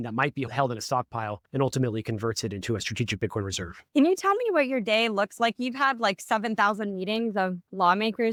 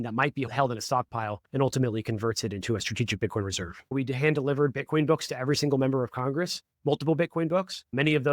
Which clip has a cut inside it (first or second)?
second